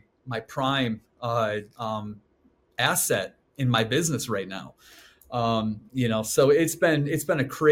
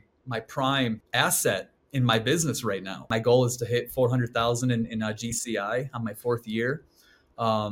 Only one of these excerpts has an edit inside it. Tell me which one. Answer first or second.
second